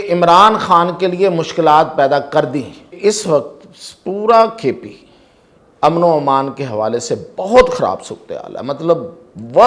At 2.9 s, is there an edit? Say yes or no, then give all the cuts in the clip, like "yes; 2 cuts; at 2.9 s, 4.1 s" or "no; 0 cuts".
yes; 1 cut; at 2.9 s